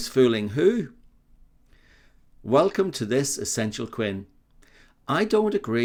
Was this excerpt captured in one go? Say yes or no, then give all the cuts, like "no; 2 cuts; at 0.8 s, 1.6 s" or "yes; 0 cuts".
yes; 0 cuts